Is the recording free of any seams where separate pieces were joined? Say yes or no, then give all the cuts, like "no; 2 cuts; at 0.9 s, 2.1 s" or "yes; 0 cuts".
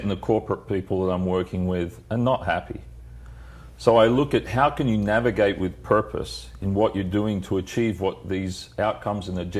yes; 0 cuts